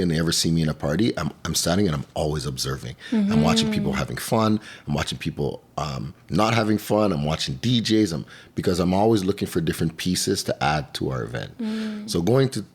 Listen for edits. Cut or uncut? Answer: uncut